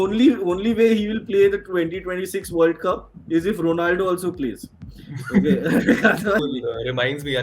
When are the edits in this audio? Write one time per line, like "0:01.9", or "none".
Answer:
0:06.4